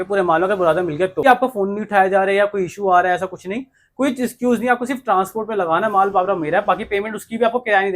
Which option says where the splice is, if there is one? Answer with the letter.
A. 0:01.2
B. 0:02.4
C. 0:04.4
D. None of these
A